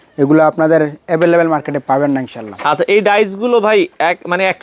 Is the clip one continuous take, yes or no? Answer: yes